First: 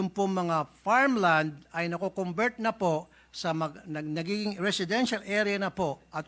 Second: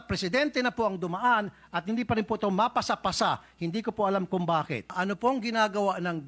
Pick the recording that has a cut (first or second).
second